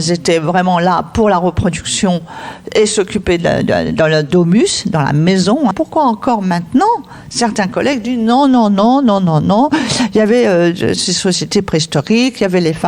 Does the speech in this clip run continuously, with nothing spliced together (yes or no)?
no